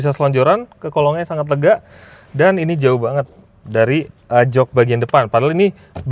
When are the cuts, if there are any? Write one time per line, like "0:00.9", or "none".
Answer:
none